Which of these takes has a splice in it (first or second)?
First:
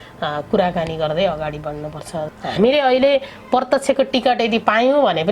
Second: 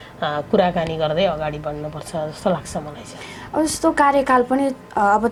first